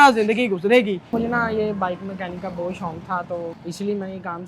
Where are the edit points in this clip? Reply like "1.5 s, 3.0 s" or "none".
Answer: 1.1 s, 3.6 s

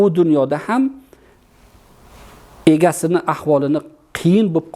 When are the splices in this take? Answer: none

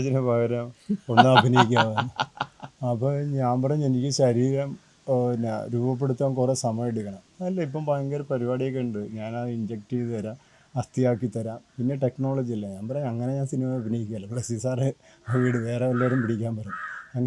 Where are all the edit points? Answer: none

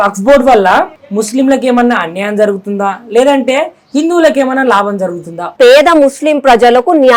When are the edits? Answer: 1.0 s, 5.5 s

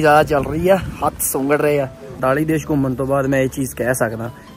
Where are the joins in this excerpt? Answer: 2.2 s

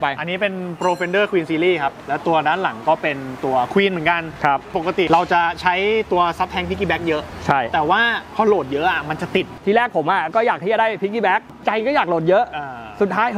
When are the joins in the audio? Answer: 2.0 s, 4.7 s, 9.5 s, 11.6 s

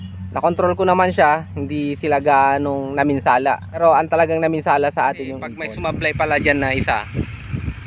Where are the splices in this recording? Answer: 3.8 s, 5.7 s

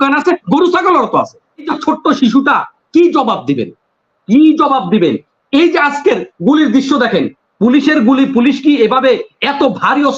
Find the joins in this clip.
1.7 s

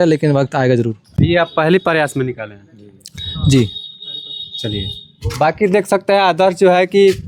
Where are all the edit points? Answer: none

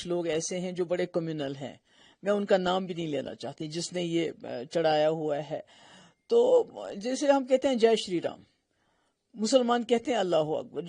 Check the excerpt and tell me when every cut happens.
none

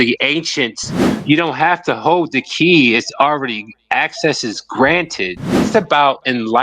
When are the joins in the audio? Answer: 1.0 s, 5.7 s

